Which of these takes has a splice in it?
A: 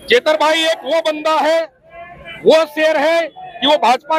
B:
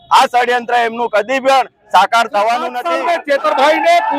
B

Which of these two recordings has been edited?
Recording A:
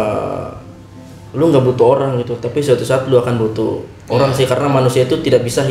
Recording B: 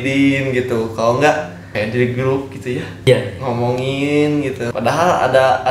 B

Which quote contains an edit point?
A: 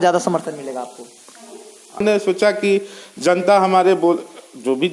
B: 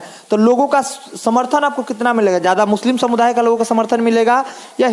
A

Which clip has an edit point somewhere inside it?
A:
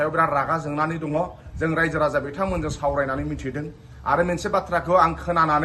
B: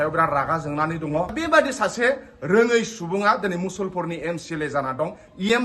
B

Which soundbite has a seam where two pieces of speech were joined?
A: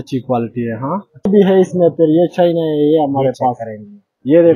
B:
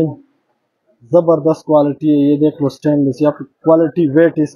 A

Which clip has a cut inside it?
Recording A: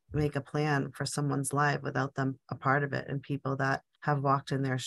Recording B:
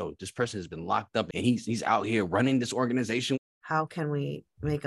B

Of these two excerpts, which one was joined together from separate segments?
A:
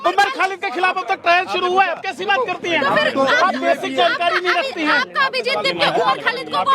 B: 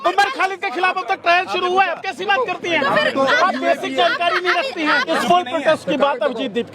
B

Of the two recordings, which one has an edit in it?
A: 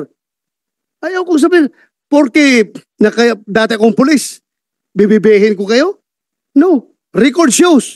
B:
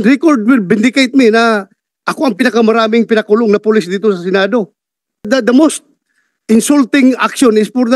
B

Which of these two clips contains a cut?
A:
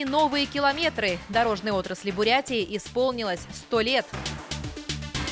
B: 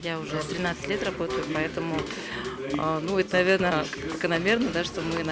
A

